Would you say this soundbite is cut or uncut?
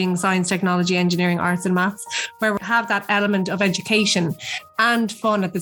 cut